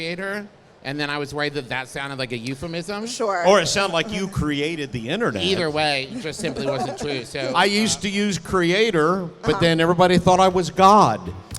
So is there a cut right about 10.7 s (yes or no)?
no